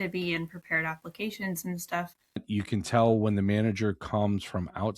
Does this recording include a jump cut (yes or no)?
yes